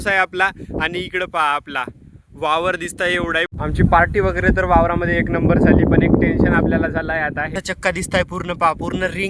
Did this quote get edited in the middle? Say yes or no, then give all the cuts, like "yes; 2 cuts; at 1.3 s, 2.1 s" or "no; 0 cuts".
yes; 2 cuts; at 3.5 s, 7.6 s